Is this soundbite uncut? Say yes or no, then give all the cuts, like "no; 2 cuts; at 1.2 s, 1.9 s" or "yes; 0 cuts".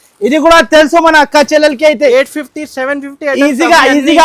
yes; 0 cuts